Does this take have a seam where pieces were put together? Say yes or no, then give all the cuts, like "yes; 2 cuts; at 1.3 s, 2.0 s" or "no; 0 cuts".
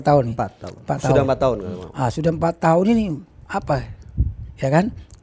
no; 0 cuts